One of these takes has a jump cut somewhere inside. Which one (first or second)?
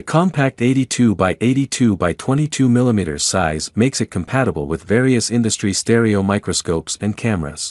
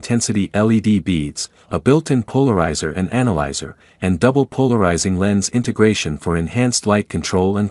first